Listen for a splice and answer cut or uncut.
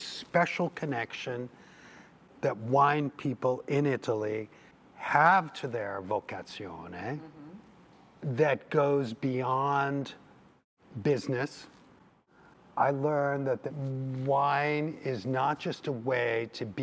cut